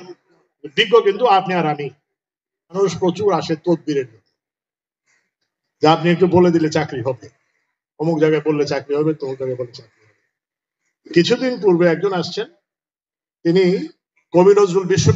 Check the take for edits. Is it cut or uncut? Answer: cut